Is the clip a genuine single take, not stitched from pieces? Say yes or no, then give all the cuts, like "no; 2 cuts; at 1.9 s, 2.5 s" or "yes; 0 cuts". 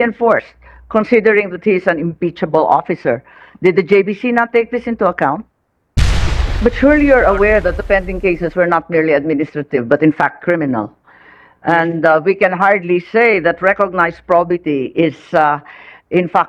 no; 1 cut; at 6.2 s